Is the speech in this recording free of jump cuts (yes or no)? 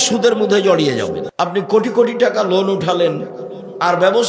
no